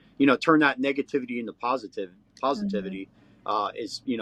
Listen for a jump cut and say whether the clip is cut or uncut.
uncut